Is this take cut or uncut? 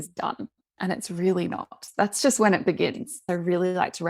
cut